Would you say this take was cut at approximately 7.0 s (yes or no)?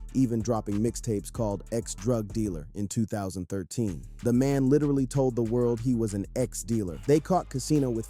yes